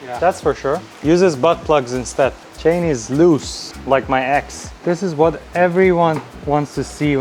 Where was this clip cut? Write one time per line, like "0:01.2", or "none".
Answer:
0:02.5
0:04.7